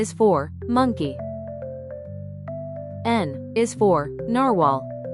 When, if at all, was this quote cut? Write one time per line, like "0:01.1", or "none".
0:01.1
0:03.0